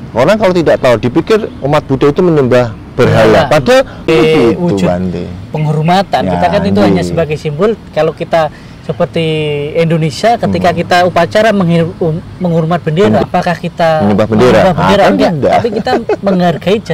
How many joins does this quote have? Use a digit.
2